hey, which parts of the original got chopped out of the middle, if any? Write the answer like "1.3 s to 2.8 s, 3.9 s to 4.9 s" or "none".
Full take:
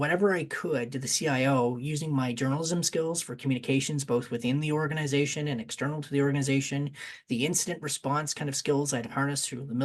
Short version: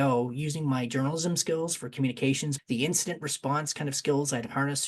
4.0 s to 7.1 s